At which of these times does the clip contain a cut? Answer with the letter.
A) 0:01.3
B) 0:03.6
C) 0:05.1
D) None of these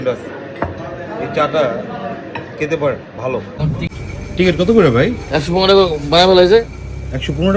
B